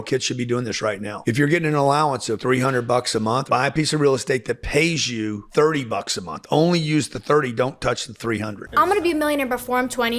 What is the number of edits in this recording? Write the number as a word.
two